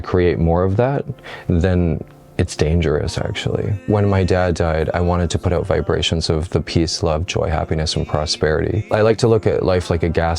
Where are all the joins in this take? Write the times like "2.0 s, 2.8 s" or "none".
3.8 s, 8.9 s